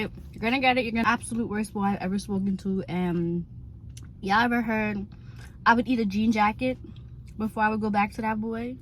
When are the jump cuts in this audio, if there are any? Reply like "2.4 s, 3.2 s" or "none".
1.0 s